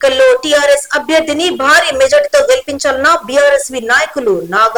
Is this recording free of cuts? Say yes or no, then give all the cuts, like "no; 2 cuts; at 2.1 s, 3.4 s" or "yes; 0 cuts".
yes; 0 cuts